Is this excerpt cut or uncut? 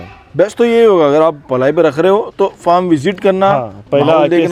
uncut